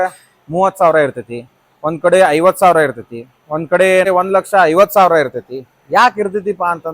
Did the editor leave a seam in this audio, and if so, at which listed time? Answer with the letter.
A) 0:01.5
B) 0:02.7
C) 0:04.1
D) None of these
C